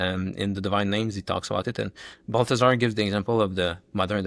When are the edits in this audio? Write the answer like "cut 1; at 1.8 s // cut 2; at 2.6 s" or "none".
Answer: none